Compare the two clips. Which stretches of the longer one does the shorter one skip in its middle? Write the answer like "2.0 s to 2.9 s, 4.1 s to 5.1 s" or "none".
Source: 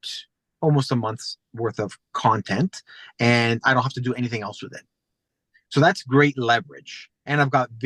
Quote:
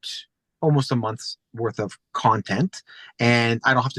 none